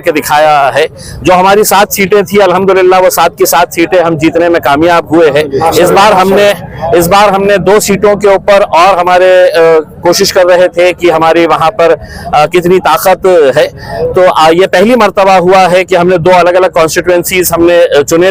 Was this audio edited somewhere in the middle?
no; 0 cuts

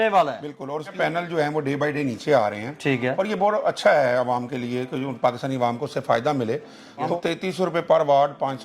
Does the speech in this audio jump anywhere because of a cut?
yes; 2 cuts; at 0.9 s, 7.1 s

